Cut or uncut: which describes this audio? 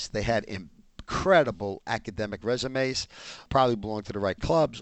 cut